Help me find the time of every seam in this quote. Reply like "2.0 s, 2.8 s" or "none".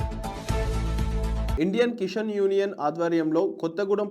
1.5 s

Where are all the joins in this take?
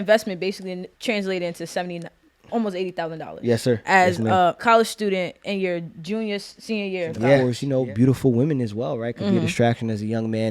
0.9 s, 4.6 s, 7.4 s

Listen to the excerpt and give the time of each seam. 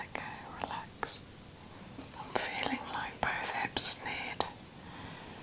2.0 s

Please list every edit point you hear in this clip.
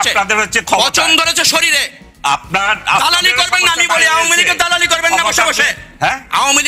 none

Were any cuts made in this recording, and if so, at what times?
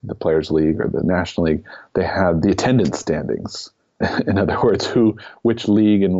2.4 s, 4.0 s

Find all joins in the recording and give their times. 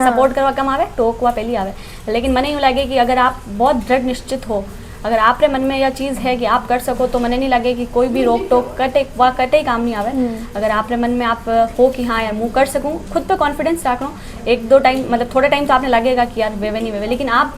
none

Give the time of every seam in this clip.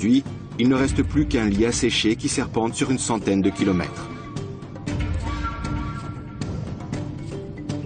5.3 s

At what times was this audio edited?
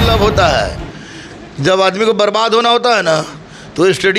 none

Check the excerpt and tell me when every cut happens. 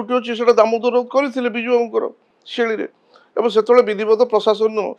none

